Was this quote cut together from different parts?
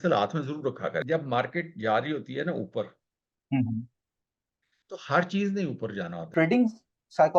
yes; 2 cuts; at 1.0 s, 6.3 s

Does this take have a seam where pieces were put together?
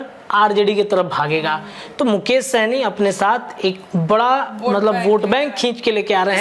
no; 0 cuts

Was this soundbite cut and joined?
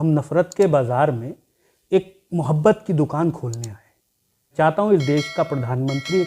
yes; 1 cut; at 4.5 s

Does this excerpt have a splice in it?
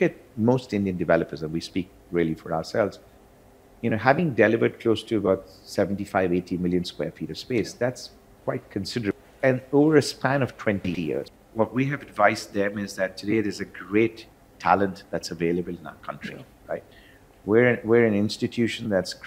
yes; 2 cuts; at 9.2 s, 10.9 s

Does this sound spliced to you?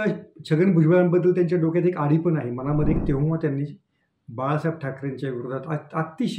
yes; 1 cut; at 3.0 s

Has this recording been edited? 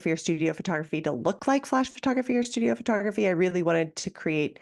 no; 0 cuts

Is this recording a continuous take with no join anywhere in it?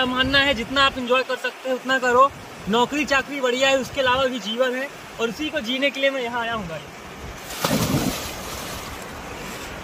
yes; 0 cuts

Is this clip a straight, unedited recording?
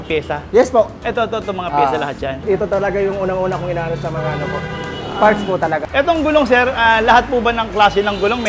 no; 2 cuts; at 2.4 s, 5.9 s

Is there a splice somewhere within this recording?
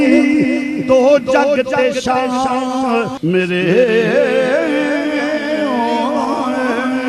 yes; 1 cut; at 3.1 s

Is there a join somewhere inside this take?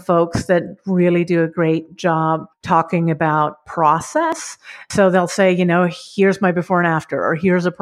yes; 2 cuts; at 2.5 s, 4.9 s

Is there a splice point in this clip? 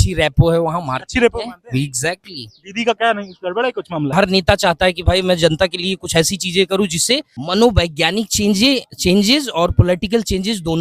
yes; 2 cuts; at 4.1 s, 7.3 s

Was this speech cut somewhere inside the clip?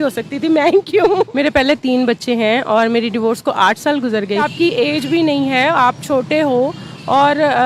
yes; 2 cuts; at 1.3 s, 4.5 s

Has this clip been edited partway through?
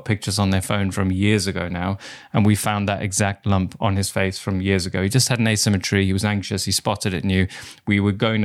no; 0 cuts

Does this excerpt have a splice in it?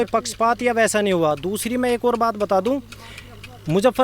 no; 0 cuts

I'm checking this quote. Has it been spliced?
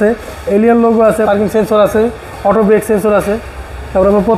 yes; 1 cut; at 1.3 s

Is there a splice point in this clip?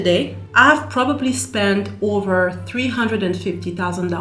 no; 0 cuts

